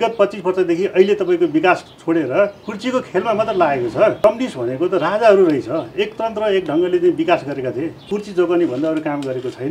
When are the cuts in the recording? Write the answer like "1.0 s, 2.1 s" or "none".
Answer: 4.2 s, 8.0 s